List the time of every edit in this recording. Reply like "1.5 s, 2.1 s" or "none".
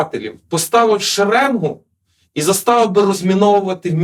none